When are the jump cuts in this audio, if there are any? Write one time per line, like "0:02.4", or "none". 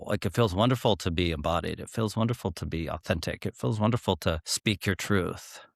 0:04.5